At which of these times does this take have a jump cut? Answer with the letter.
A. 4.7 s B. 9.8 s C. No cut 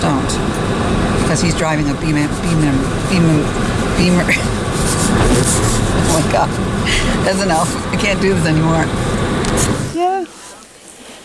B